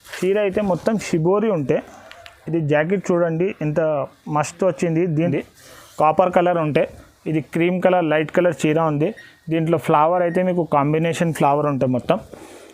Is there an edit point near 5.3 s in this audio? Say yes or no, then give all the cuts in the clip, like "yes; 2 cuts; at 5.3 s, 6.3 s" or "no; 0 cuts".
yes; 1 cut; at 5.3 s